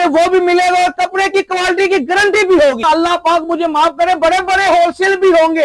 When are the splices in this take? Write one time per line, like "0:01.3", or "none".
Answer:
0:02.8